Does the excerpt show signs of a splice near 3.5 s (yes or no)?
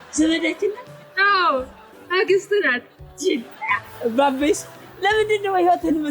yes